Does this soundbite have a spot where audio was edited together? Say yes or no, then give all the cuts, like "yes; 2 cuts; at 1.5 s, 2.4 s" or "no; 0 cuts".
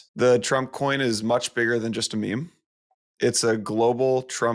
no; 0 cuts